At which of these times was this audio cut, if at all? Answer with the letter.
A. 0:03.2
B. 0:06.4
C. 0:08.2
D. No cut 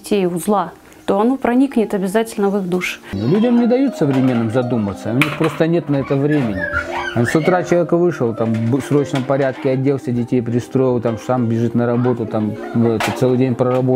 A